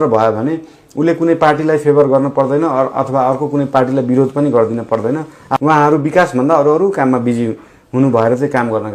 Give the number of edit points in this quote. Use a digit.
1